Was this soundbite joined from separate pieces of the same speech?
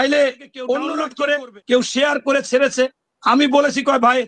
yes; 1 cut; at 1.0 s

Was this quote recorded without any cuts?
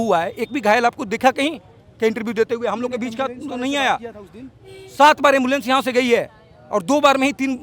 yes; 0 cuts

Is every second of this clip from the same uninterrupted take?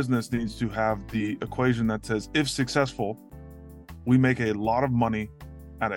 yes; 0 cuts

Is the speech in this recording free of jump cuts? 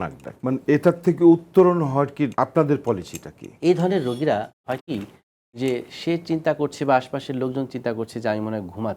no; 1 cut; at 3.4 s

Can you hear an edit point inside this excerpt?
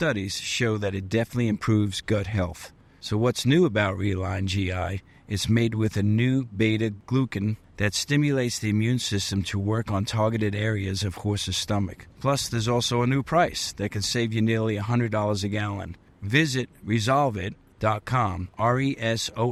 no; 0 cuts

